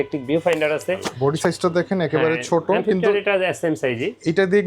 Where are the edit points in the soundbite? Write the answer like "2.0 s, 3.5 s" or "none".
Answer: 1.1 s